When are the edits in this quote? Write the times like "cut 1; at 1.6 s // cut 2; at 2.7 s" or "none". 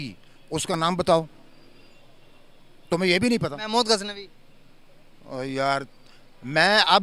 none